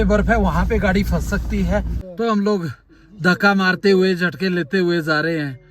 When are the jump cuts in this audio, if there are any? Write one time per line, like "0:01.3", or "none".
0:02.0